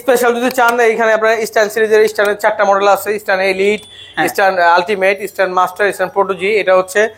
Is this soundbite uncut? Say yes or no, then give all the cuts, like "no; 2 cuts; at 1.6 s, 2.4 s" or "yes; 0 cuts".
yes; 0 cuts